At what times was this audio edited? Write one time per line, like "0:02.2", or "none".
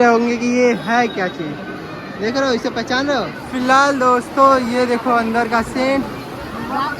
0:03.5